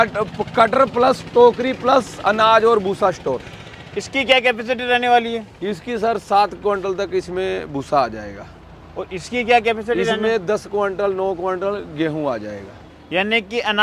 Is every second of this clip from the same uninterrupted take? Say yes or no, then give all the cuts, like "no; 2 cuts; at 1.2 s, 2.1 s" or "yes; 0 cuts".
yes; 0 cuts